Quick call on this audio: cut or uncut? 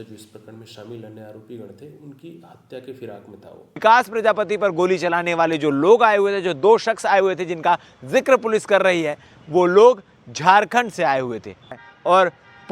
cut